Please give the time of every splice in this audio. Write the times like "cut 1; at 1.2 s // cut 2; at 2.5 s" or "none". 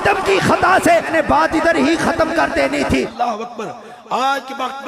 cut 1; at 1.1 s // cut 2; at 3.1 s